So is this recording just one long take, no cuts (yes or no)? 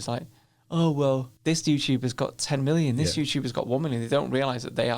no